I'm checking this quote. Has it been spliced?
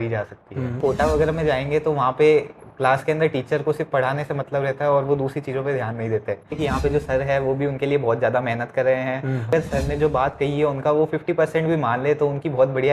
yes; 3 cuts; at 0.8 s, 6.6 s, 9.5 s

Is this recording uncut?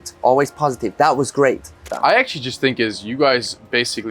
no; 1 cut; at 1.8 s

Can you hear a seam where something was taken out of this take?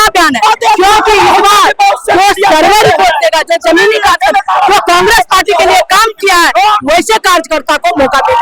no; 0 cuts

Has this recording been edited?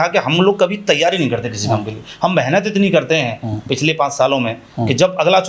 no; 0 cuts

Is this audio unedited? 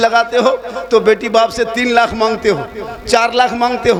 yes; 0 cuts

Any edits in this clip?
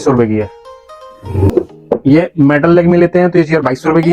yes; 1 cut; at 1.5 s

